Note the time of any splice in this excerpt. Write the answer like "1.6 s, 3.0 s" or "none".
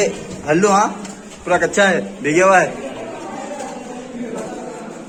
none